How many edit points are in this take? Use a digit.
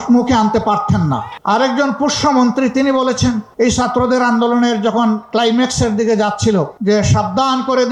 0